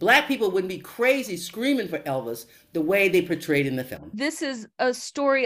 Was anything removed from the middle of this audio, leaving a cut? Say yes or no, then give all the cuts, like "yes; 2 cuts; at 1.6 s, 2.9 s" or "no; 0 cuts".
yes; 1 cut; at 4.1 s